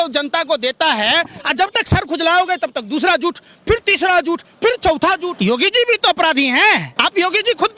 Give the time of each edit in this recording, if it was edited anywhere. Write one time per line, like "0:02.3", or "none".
0:05.3
0:06.9

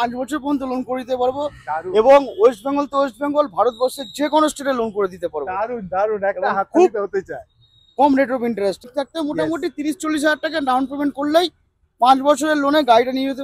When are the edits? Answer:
0:08.8

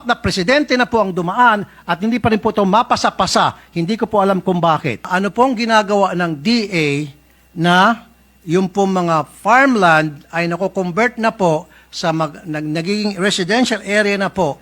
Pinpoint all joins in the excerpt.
0:05.1

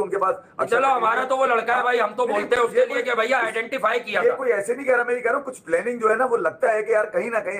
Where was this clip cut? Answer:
none

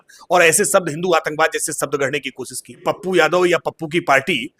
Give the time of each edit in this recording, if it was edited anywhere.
0:02.8

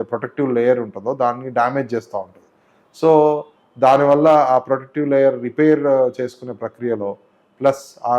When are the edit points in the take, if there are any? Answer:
none

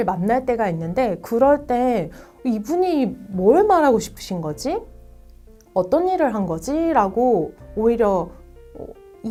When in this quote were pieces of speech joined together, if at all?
none

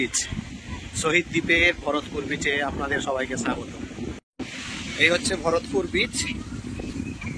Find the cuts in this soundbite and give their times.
0:04.2

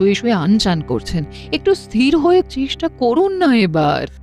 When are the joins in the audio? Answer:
0:02.5

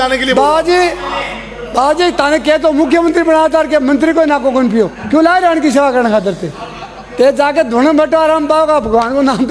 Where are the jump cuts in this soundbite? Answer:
none

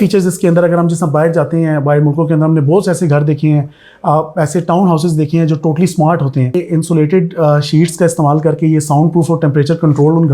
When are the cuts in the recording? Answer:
0:06.5

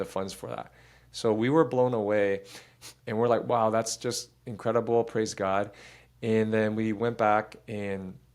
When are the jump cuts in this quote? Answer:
none

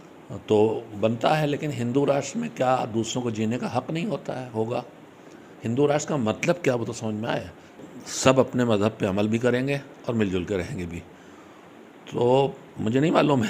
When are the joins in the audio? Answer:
0:07.8

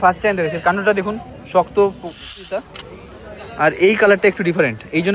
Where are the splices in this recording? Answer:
0:02.5

